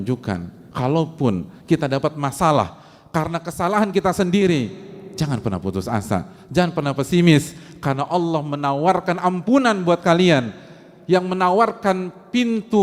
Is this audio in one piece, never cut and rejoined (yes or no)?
yes